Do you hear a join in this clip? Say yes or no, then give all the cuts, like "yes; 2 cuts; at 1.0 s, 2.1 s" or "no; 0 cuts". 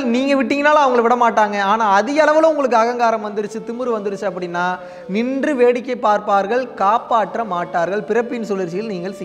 no; 0 cuts